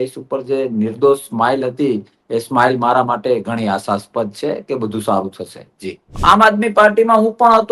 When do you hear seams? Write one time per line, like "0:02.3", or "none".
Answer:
0:06.1